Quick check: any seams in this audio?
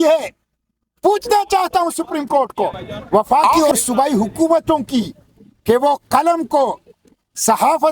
yes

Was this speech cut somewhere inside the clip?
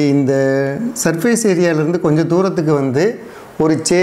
no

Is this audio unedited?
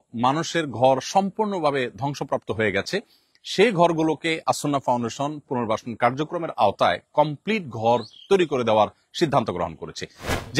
yes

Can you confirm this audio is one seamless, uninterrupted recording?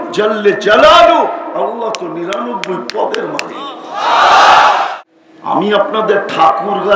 no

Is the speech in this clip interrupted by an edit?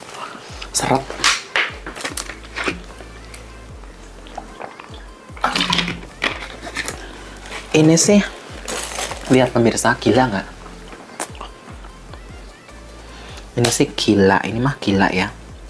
no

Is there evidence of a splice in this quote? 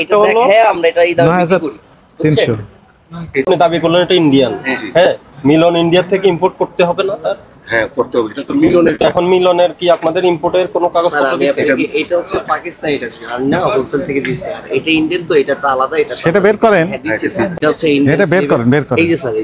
yes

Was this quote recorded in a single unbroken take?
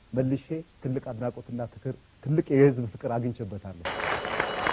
yes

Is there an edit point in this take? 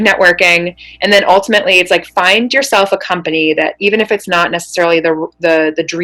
no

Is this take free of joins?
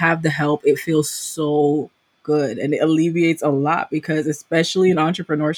yes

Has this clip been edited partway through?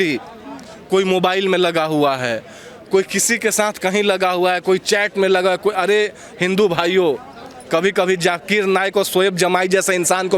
no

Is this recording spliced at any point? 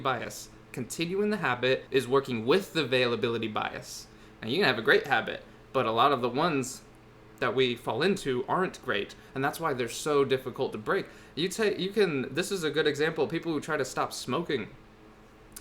yes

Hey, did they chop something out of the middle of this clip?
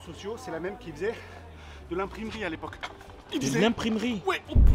no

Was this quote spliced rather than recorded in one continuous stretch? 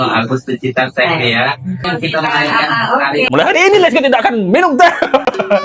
yes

